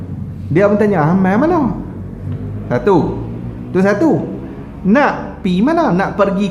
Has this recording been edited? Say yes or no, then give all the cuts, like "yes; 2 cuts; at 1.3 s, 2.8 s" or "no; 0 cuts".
no; 0 cuts